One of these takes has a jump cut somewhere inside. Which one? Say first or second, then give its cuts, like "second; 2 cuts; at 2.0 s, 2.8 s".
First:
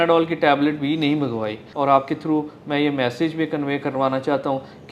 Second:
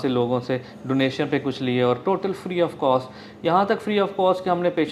first; 1 cut; at 1.6 s